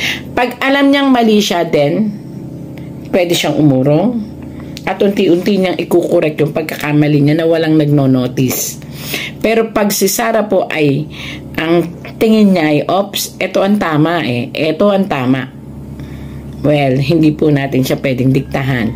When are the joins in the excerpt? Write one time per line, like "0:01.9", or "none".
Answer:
none